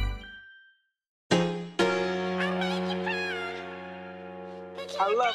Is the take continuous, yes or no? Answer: no